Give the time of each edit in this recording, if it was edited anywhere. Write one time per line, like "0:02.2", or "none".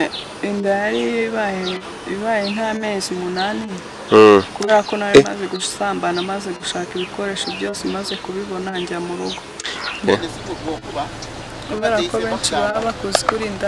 0:10.0